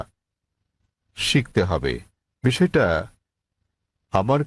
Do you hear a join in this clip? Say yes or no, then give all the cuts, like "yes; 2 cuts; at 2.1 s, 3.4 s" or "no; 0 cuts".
no; 0 cuts